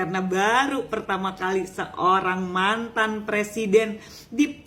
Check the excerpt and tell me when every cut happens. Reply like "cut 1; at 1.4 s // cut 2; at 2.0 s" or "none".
none